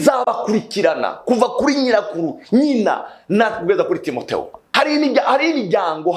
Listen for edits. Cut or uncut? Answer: cut